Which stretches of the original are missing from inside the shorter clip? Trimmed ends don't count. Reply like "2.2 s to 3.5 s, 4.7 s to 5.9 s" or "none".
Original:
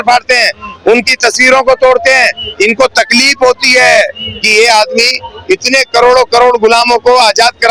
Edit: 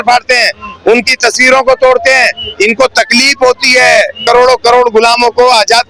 4.2 s to 5.9 s